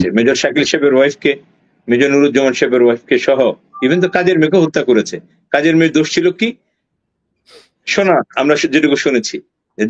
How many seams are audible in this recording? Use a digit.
0